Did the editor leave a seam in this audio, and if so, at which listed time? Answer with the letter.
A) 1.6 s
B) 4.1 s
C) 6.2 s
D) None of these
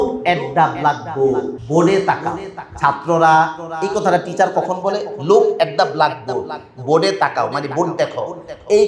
A